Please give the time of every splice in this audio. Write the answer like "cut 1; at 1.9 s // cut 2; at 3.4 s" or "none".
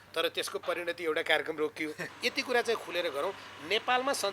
cut 1; at 2.1 s